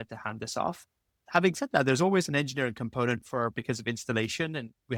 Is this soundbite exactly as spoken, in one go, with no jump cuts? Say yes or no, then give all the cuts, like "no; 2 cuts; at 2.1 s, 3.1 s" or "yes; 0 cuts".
yes; 0 cuts